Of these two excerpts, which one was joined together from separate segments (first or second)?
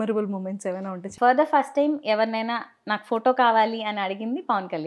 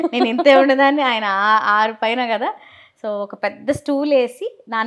first